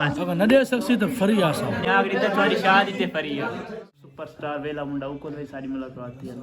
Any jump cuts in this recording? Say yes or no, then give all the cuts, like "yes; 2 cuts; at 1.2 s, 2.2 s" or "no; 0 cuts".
yes; 2 cuts; at 1.8 s, 3.7 s